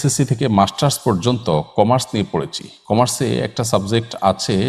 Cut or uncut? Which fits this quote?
uncut